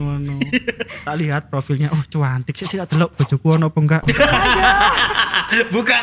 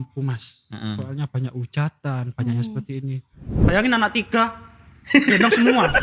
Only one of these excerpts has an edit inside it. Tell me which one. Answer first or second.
second